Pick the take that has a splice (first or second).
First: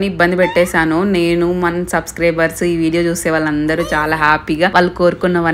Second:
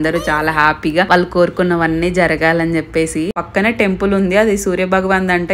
second